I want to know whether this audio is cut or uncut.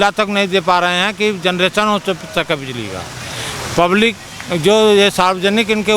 uncut